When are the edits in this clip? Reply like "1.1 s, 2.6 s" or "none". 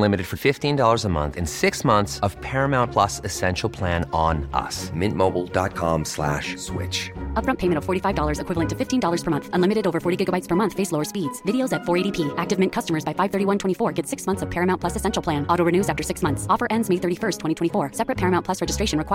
none